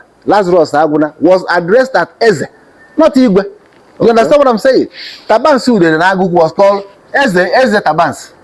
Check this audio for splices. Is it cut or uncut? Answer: uncut